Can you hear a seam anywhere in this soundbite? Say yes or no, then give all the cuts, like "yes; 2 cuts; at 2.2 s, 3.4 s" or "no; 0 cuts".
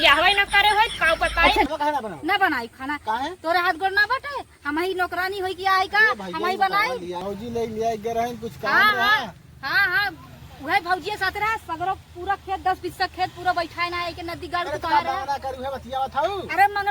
yes; 2 cuts; at 1.7 s, 7.2 s